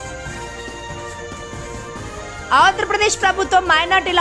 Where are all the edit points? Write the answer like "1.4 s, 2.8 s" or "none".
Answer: 1.1 s, 2.2 s